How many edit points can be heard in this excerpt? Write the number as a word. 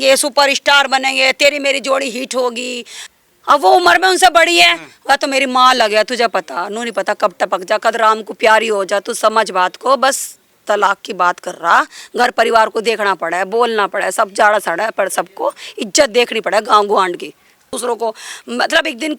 two